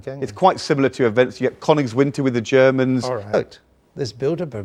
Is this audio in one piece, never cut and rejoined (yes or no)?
yes